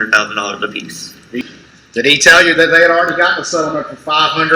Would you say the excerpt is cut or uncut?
cut